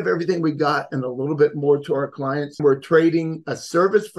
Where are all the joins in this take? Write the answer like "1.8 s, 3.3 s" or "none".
2.5 s